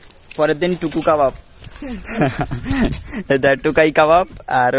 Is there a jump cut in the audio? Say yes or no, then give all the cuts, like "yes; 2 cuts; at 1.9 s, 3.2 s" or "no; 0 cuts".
no; 0 cuts